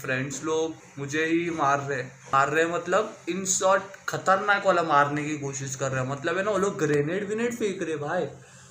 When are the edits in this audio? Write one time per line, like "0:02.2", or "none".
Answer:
0:00.9
0:02.2